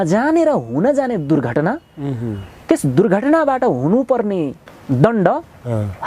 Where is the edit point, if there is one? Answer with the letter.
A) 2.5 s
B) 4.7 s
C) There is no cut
B